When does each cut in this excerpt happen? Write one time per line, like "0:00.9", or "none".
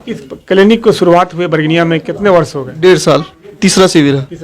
0:03.5